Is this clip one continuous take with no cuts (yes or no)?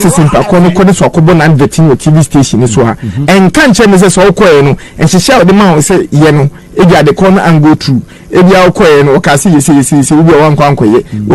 yes